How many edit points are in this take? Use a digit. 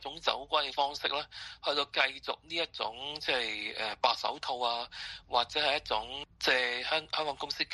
1